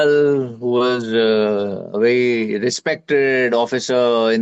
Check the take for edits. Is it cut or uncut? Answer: uncut